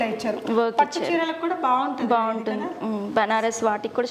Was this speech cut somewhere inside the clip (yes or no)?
no